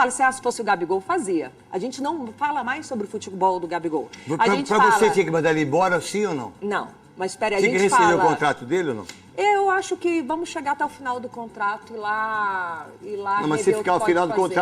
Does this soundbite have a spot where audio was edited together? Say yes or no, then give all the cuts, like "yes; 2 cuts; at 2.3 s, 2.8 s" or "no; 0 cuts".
no; 0 cuts